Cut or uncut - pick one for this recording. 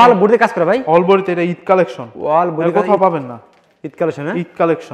uncut